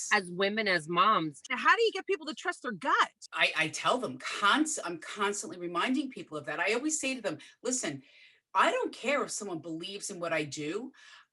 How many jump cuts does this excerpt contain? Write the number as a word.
two